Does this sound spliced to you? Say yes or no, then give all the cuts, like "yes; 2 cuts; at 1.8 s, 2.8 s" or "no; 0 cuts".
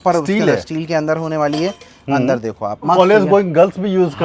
yes; 1 cut; at 2.9 s